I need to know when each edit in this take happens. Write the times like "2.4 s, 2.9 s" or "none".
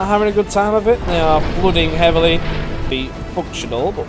2.9 s

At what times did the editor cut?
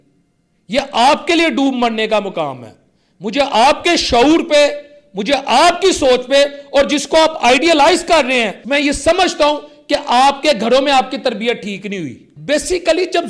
8.6 s, 12.3 s

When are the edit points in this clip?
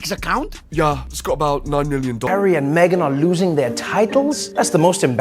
2.2 s

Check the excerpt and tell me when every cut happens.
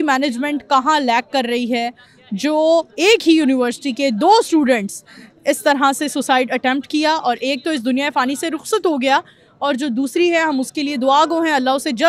none

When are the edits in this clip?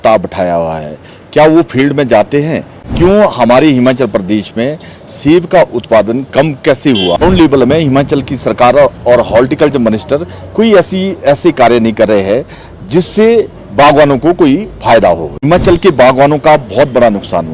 7.2 s, 15.5 s

